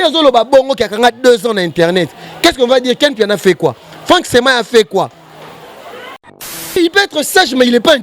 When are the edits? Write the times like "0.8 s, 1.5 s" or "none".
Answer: 6.8 s